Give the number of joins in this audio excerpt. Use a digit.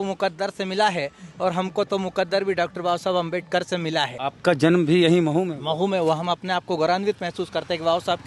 1